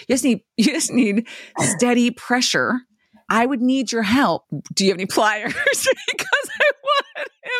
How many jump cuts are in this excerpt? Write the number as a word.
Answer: two